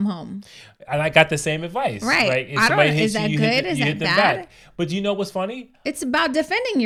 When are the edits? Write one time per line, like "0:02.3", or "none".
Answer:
none